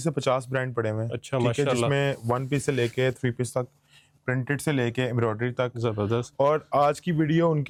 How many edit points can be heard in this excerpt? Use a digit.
0